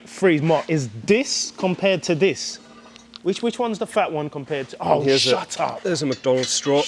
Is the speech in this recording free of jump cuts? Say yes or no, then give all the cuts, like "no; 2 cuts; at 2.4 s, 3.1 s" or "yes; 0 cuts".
yes; 0 cuts